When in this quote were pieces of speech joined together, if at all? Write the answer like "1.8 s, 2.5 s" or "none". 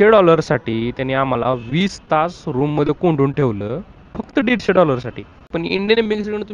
5.6 s